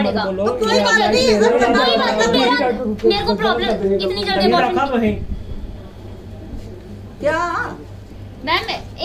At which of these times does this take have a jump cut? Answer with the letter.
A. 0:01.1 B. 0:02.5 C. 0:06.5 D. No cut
D